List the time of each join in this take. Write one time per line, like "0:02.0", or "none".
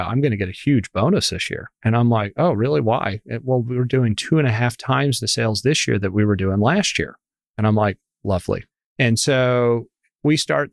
0:08.7